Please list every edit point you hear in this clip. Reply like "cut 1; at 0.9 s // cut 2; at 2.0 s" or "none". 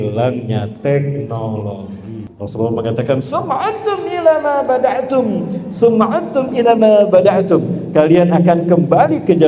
cut 1; at 2.3 s